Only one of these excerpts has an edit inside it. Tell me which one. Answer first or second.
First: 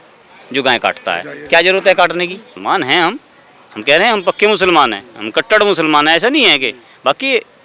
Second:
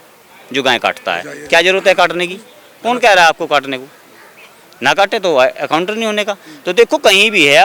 first